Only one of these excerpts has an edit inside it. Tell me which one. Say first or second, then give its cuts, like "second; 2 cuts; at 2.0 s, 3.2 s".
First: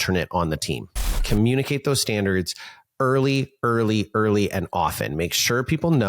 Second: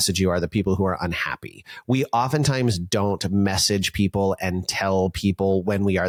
first; 1 cut; at 1.1 s